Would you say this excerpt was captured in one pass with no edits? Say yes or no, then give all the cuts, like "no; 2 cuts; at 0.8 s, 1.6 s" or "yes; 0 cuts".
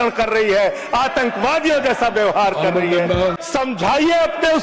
no; 1 cut; at 3.4 s